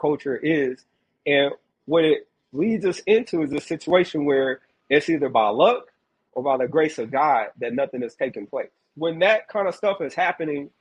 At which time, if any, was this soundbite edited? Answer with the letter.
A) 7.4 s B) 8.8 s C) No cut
B